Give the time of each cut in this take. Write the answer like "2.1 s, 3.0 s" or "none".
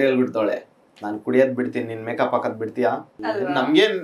3.1 s